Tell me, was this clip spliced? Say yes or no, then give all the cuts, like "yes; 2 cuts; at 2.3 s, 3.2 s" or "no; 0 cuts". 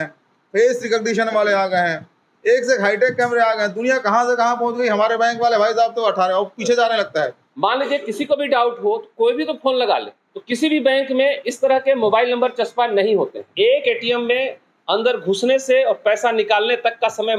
yes; 3 cuts; at 7.4 s, 10.1 s, 13.4 s